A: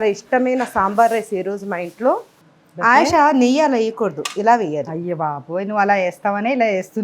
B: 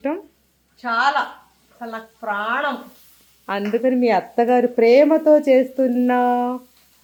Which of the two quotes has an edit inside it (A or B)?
A